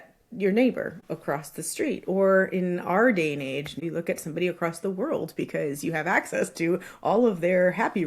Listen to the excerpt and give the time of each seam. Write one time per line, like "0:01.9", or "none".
0:01.0
0:03.8